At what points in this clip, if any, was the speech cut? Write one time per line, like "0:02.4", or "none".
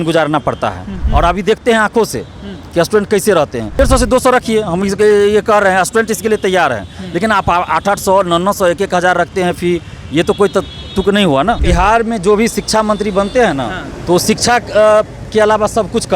0:01.0
0:03.8
0:11.6